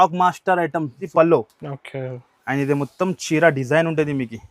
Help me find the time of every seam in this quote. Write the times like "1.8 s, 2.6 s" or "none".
1.0 s

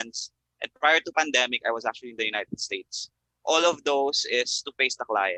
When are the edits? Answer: none

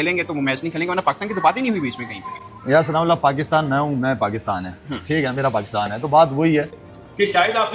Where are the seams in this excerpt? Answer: 6.8 s

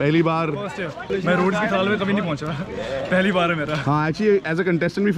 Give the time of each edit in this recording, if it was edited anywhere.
1.1 s

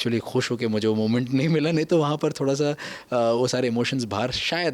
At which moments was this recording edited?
none

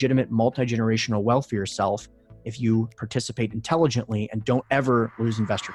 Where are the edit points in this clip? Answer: none

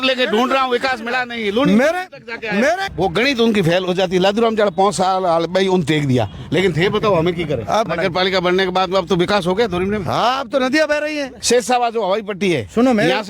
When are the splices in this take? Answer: 2.9 s, 7.9 s, 11.3 s

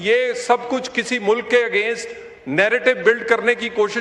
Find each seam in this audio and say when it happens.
none

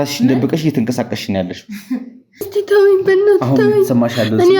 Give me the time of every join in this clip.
2.5 s

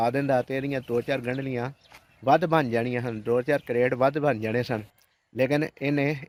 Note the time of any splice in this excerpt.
none

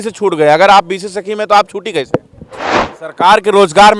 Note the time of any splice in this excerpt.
2.8 s

